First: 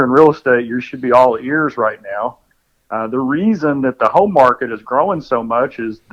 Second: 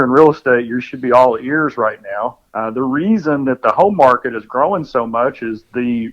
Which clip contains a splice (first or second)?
second